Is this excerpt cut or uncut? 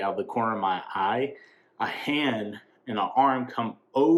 uncut